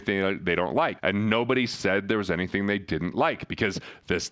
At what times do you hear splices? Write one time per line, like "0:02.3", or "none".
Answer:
0:01.0